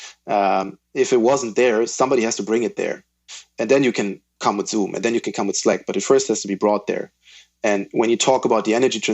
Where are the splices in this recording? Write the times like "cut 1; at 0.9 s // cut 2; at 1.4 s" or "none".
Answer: cut 1; at 3.5 s